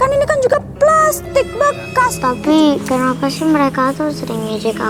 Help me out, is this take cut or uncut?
cut